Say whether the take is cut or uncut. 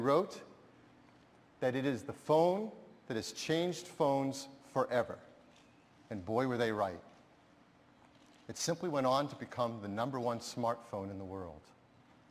uncut